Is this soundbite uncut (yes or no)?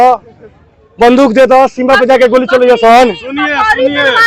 yes